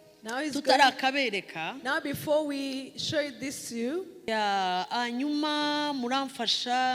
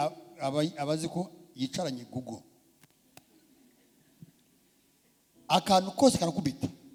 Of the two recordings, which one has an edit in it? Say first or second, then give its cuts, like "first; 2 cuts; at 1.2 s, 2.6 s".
first; 1 cut; at 4.3 s